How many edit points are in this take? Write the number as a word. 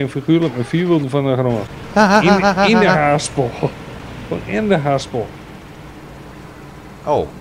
one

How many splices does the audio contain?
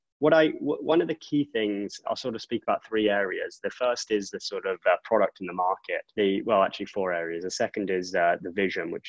two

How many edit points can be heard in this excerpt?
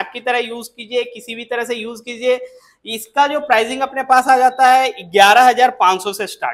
zero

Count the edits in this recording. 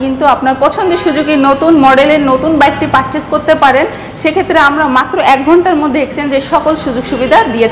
zero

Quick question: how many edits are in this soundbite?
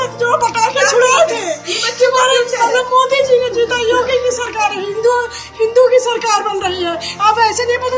zero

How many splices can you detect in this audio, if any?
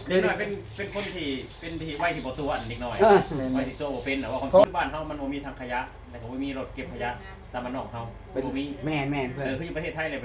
one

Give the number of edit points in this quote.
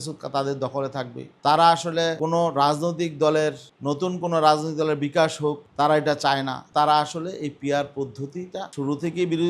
two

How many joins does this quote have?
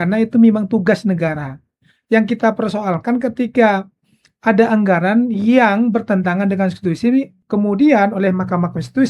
one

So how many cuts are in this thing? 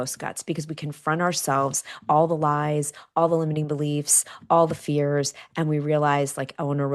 zero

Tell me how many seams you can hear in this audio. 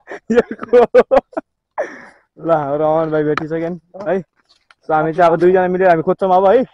zero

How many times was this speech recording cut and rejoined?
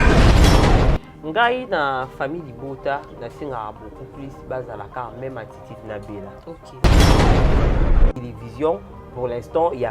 three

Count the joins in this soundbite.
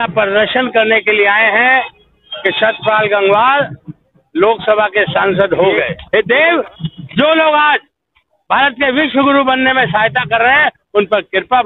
one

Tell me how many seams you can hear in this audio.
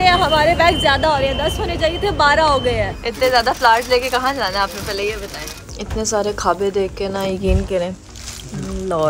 two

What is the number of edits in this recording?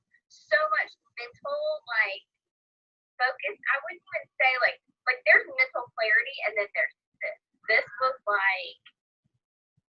zero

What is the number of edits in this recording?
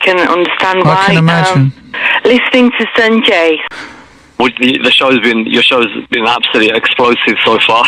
one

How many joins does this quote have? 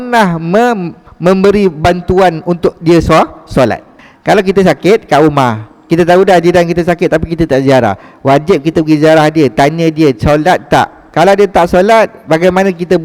one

